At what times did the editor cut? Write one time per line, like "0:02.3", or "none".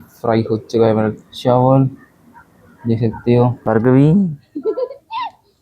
0:03.6